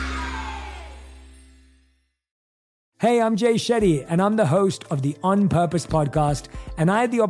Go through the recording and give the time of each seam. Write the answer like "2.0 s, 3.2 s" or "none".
none